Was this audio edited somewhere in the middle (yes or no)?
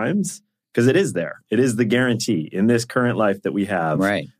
no